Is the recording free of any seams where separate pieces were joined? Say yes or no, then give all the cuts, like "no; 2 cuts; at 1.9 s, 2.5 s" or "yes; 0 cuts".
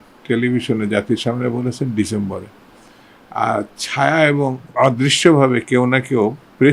no; 1 cut; at 4.6 s